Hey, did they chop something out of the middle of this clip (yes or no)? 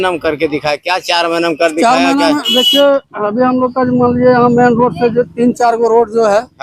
no